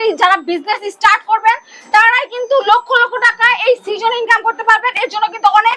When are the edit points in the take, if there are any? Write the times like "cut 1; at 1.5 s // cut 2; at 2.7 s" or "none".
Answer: none